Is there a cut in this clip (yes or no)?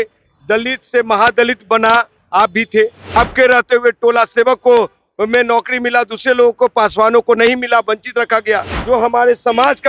yes